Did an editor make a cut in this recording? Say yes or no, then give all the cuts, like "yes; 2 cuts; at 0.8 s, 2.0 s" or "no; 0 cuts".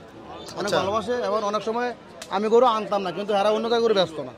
no; 0 cuts